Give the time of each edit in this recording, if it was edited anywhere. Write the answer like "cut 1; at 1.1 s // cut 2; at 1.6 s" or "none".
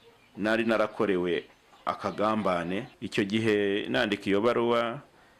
cut 1; at 3.0 s